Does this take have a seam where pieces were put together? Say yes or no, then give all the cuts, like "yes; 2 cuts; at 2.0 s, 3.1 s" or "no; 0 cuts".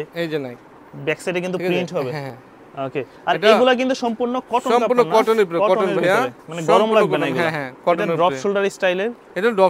no; 0 cuts